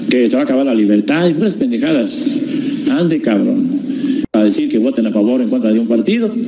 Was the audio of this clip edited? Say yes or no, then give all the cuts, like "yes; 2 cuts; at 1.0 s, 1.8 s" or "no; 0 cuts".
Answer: yes; 1 cut; at 4.2 s